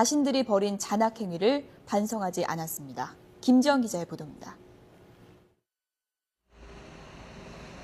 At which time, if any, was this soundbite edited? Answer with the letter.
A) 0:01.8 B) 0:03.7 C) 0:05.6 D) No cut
B